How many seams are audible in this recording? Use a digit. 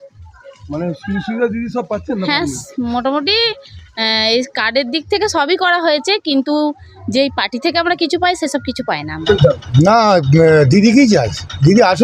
1